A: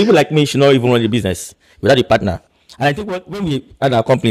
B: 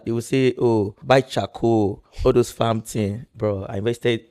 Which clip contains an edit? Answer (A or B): B